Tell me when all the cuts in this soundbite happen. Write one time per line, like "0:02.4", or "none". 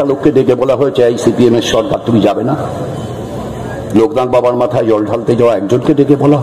none